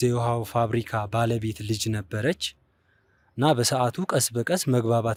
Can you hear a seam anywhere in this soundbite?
no; 0 cuts

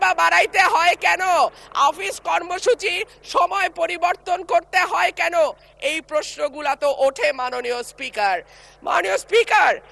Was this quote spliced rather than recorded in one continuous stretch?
no; 0 cuts

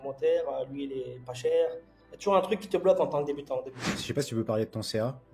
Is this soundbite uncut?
no; 1 cut; at 3.9 s

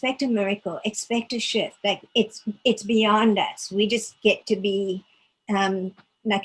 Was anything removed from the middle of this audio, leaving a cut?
no; 0 cuts

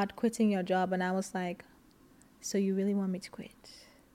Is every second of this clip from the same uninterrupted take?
yes; 0 cuts

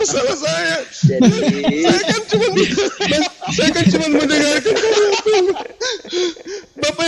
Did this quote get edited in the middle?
no; 0 cuts

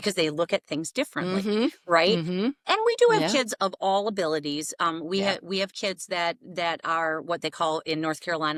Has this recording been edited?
no; 0 cuts

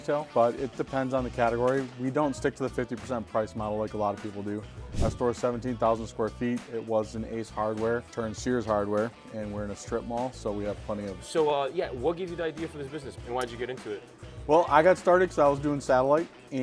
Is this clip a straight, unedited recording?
no; 2 cuts; at 11.2 s, 13.1 s

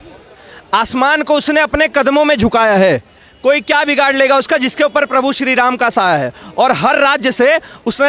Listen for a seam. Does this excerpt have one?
no; 0 cuts

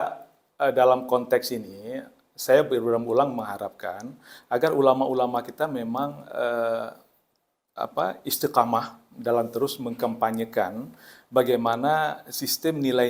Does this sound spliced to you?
no; 0 cuts

